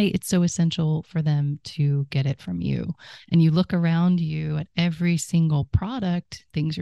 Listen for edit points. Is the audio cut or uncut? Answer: cut